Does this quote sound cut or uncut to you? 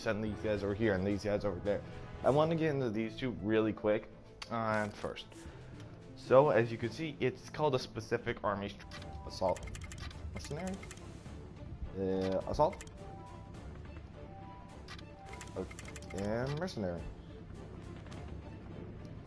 uncut